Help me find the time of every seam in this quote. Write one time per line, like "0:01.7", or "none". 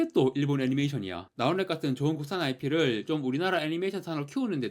0:01.2